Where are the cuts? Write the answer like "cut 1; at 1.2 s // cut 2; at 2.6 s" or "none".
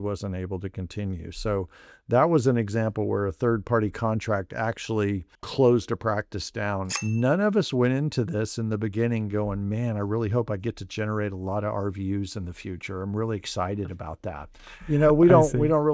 cut 1; at 5.4 s // cut 2; at 6.9 s